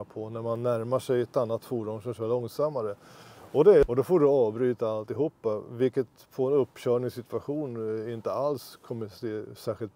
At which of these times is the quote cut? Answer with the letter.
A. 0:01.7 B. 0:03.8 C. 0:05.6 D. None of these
B